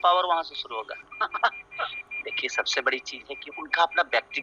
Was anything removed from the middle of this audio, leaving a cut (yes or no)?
no